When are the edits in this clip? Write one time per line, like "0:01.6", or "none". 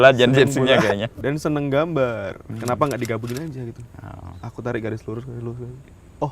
0:01.2

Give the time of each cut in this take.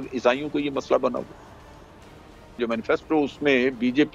0:02.6

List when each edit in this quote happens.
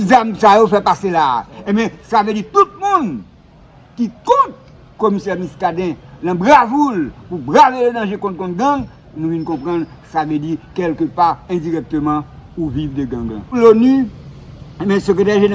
0:13.6

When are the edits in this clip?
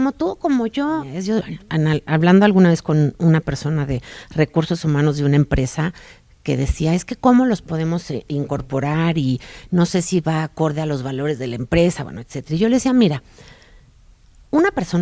0:01.2

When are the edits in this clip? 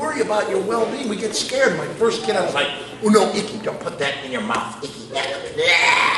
none

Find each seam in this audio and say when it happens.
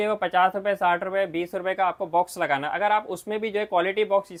none

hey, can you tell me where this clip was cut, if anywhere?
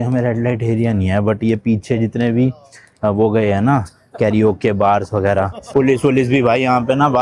0:05.7

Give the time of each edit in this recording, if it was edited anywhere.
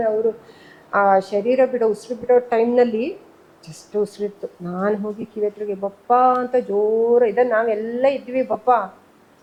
none

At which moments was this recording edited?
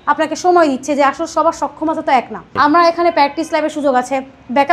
0:02.5

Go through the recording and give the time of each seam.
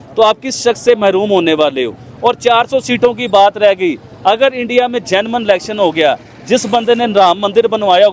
none

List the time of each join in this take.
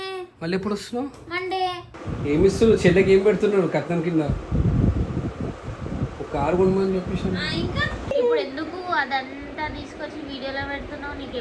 0:02.0
0:08.1

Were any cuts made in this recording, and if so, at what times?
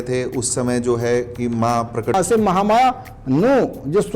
0:02.1

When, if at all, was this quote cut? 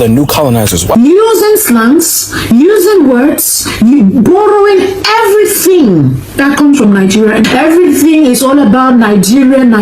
0:00.9

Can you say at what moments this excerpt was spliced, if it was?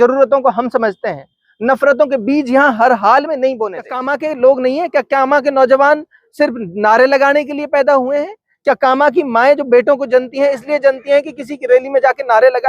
0:04.0

